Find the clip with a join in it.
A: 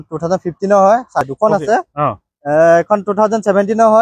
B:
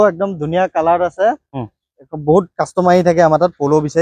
A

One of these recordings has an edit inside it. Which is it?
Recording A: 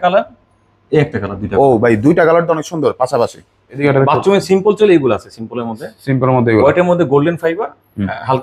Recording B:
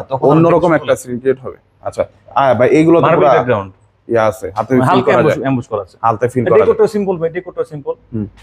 A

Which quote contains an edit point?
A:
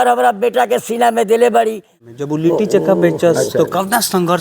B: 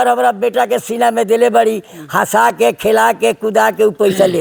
A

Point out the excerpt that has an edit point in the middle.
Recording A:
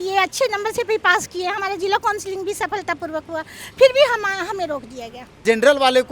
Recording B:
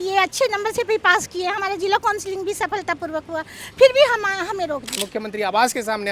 B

